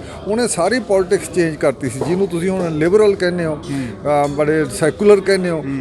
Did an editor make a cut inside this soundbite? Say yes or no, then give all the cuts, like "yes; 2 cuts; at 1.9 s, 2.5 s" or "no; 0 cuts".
no; 0 cuts